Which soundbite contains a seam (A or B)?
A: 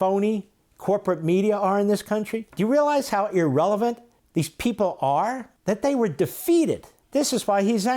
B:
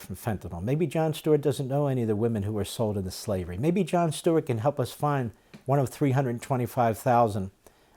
A